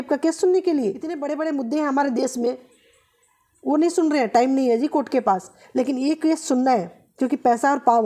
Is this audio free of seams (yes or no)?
no